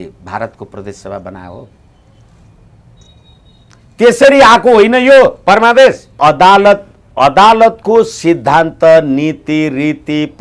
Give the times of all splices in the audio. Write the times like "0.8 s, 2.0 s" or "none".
6.2 s